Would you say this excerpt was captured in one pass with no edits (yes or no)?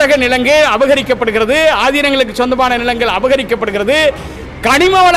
yes